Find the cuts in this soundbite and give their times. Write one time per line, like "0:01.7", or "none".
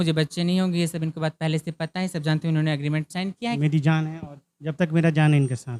0:03.6

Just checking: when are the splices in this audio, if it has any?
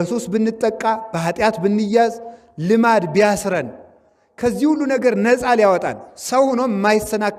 none

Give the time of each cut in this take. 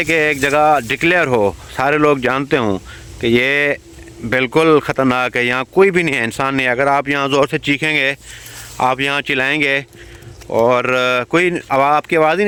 none

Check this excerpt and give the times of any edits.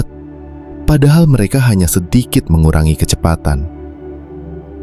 0:03.6

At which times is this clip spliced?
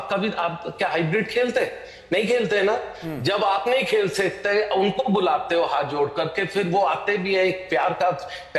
none

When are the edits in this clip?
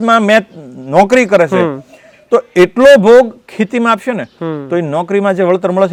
none

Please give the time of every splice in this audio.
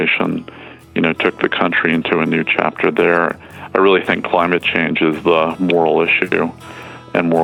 none

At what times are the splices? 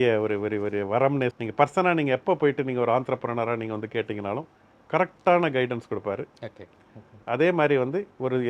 0:01.4

